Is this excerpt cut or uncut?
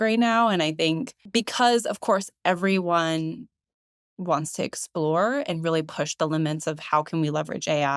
uncut